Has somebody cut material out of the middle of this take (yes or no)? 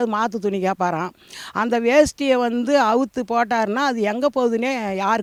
no